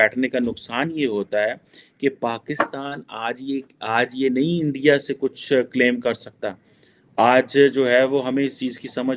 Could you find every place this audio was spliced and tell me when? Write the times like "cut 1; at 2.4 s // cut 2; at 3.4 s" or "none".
none